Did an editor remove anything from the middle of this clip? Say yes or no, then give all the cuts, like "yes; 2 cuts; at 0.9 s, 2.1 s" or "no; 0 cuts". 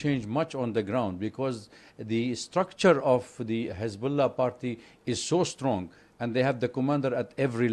no; 0 cuts